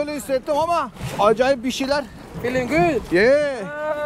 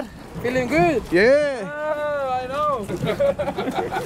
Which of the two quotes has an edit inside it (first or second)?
first